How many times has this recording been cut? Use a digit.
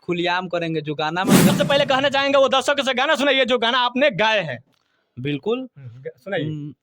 1